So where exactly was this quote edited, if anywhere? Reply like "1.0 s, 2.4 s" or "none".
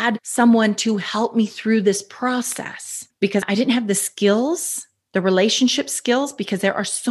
3.5 s